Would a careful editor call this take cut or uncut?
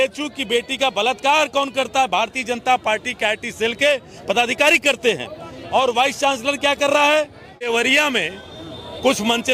cut